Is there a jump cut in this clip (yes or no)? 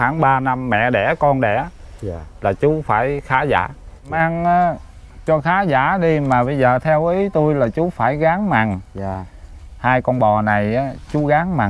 yes